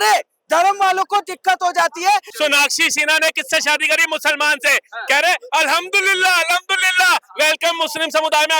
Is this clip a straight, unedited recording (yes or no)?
no